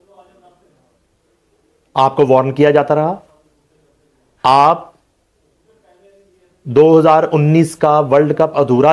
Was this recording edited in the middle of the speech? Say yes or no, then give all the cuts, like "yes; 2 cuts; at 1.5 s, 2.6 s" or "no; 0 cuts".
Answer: no; 0 cuts